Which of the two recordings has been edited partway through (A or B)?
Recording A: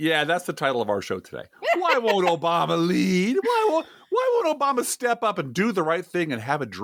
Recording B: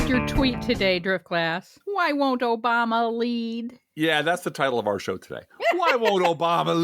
B